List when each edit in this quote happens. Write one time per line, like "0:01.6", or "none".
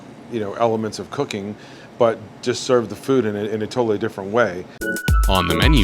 0:04.8